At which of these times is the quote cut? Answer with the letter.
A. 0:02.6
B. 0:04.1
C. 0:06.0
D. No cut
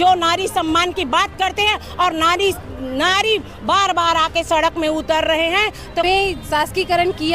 C